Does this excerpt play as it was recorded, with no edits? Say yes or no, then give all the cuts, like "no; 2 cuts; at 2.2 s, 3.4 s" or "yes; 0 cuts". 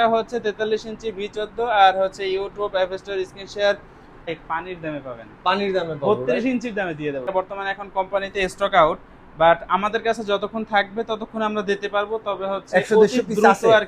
no; 2 cuts; at 4.3 s, 7.3 s